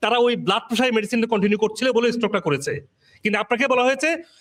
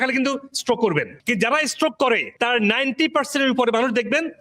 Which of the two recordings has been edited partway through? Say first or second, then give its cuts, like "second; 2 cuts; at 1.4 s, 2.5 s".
second; 2 cuts; at 1.2 s, 2.3 s